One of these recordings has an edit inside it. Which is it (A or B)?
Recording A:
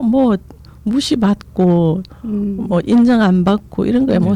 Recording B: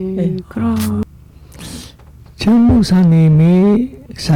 B